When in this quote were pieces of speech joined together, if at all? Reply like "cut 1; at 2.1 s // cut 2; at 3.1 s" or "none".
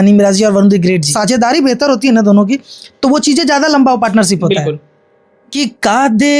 cut 1; at 1.1 s // cut 2; at 5.5 s